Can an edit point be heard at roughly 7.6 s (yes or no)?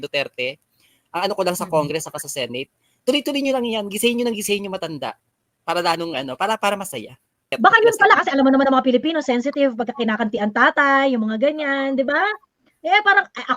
yes